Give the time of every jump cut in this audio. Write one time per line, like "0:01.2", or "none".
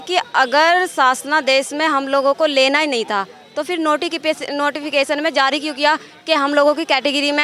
none